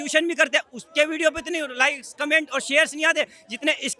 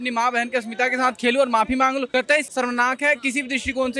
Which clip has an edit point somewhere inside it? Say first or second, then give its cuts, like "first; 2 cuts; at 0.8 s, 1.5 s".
second; 1 cut; at 2.3 s